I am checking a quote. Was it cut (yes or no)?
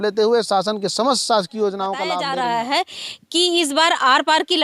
yes